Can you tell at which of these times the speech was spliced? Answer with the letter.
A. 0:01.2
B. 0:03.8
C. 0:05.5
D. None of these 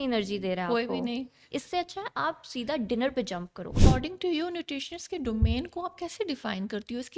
B